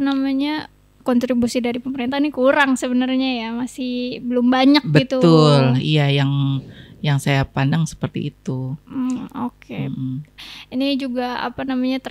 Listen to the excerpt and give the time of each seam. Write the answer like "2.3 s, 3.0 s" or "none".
none